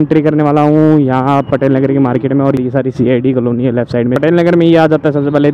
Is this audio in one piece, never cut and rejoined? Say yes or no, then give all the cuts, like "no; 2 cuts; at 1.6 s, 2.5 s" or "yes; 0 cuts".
no; 2 cuts; at 2.6 s, 4.2 s